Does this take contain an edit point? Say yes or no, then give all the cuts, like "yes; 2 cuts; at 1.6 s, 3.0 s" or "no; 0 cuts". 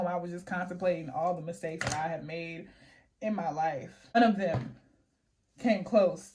no; 0 cuts